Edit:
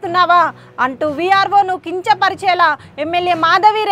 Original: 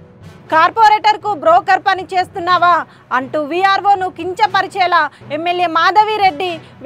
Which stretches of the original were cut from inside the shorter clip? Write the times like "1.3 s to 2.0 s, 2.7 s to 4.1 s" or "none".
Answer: none